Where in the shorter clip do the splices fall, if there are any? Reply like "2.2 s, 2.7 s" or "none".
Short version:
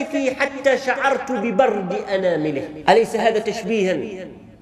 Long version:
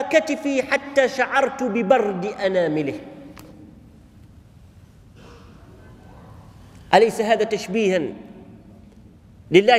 2.7 s